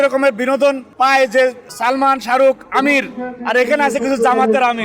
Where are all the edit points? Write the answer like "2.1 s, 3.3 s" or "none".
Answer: 0.9 s, 1.7 s